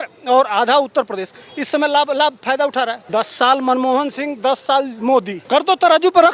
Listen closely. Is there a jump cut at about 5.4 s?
yes; 2 cuts; at 3.0 s, 5.4 s

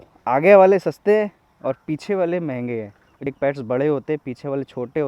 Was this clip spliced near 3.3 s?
yes; 1 cut; at 3.3 s

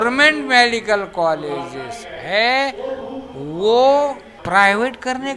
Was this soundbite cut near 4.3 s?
yes; 1 cut; at 4.3 s

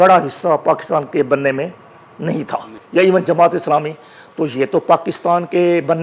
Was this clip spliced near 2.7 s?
yes; 1 cut; at 2.7 s

